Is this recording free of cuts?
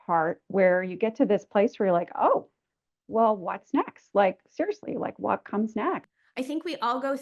no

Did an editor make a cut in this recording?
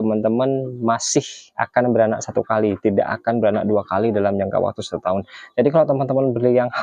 no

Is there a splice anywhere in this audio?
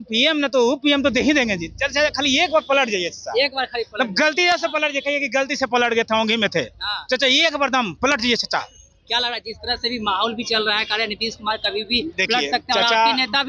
no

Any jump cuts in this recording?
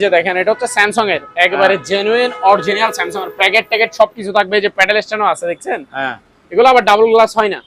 no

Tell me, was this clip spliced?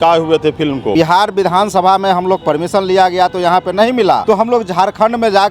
yes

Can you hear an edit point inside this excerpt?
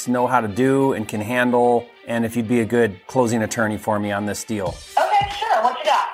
yes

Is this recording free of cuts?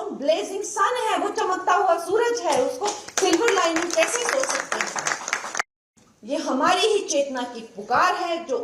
no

